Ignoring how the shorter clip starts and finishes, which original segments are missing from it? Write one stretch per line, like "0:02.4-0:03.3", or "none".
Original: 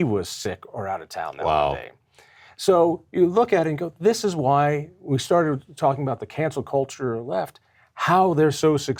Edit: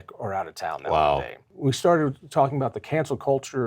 0:02.0-0:04.9